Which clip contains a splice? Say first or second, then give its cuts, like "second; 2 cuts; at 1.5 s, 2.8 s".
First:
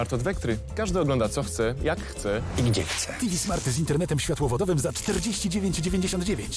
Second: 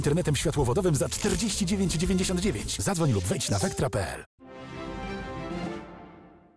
second; 1 cut; at 4.2 s